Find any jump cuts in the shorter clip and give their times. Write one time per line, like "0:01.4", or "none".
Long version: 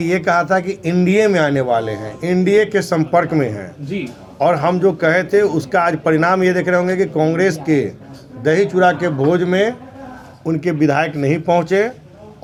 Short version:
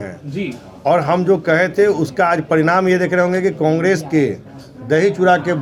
none